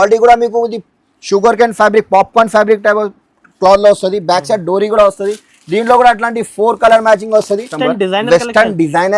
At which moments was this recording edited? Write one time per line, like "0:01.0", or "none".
0:07.7